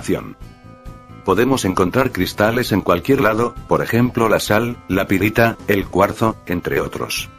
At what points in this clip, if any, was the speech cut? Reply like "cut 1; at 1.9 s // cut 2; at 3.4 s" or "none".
none